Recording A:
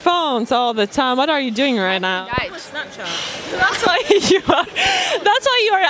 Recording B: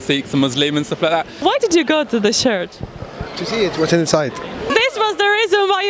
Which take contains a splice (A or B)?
B